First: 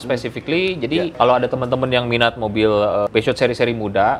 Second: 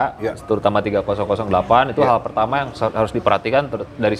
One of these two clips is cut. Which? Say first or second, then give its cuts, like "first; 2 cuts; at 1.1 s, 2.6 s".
first; 2 cuts; at 1.1 s, 3.1 s